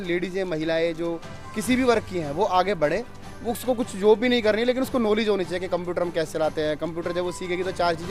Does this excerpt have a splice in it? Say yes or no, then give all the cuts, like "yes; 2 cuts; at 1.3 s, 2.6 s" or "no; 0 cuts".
no; 0 cuts